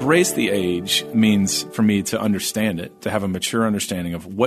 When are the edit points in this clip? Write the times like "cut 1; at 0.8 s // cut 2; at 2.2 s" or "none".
cut 1; at 1.0 s